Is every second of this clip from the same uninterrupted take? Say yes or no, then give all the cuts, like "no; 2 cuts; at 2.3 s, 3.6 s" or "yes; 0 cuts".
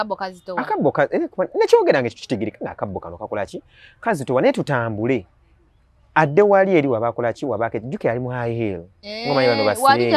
yes; 0 cuts